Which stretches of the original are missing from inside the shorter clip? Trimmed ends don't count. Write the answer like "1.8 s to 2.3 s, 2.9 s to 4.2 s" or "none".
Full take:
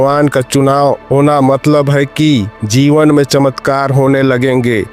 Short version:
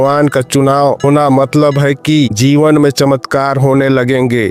1.0 s to 1.1 s, 2.4 s to 2.7 s